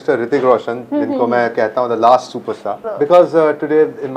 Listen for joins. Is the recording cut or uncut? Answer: cut